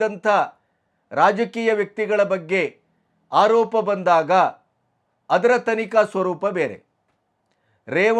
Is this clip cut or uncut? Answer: uncut